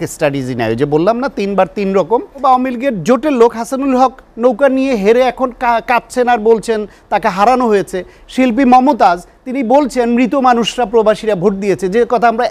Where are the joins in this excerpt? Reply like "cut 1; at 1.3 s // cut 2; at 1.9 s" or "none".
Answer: cut 1; at 2.4 s